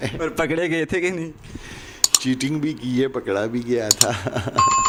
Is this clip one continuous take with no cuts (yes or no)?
yes